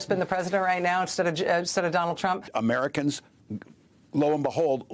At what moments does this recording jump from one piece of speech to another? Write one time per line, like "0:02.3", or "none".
0:02.5